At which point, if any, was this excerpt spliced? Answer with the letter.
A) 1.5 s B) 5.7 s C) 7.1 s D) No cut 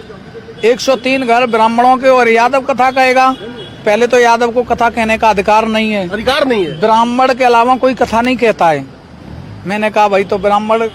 D